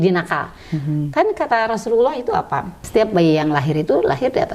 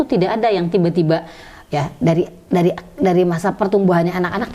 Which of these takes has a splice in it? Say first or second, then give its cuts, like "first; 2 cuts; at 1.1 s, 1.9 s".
first; 1 cut; at 2.7 s